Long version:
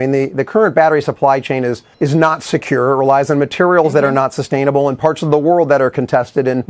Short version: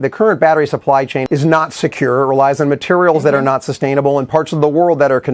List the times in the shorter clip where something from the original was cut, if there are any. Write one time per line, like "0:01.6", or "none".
0:01.2